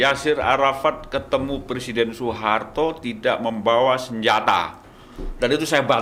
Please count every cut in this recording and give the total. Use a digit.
0